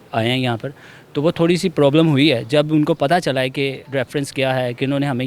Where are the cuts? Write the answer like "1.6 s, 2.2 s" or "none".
none

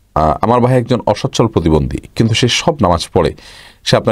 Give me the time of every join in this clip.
none

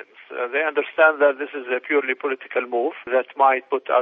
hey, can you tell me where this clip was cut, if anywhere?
none

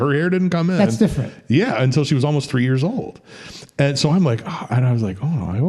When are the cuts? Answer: none

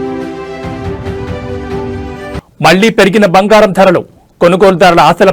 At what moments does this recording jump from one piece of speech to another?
none

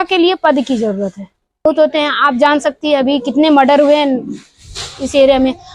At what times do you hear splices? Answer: 1.7 s

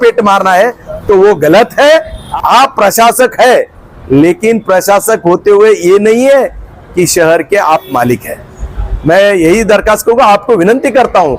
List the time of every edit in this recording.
2.2 s

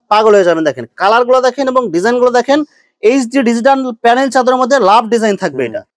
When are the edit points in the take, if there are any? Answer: none

